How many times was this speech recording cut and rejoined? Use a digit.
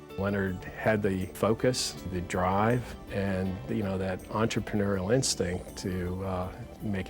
3